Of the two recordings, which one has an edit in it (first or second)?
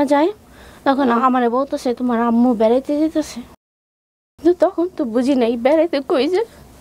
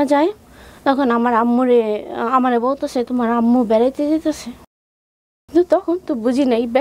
first